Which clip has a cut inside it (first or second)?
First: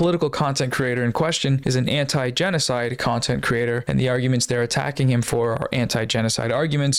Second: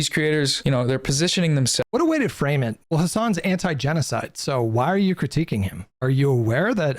second